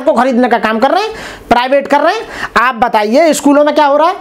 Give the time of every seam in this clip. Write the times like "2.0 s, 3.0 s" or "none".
none